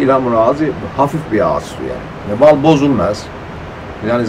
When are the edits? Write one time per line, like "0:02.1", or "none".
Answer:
0:02.3